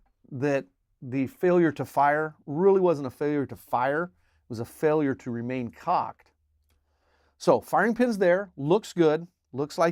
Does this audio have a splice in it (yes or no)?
no